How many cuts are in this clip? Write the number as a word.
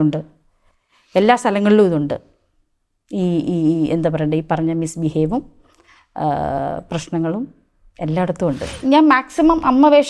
one